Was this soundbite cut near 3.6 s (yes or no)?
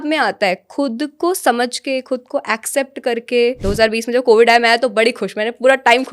yes